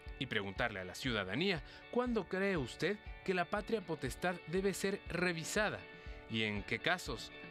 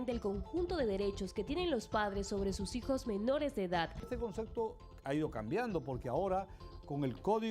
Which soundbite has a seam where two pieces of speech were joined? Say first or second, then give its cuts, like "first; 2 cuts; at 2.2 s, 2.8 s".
second; 1 cut; at 4.0 s